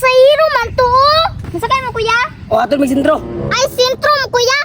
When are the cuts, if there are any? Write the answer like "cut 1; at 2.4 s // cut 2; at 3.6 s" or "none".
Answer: cut 1; at 1.4 s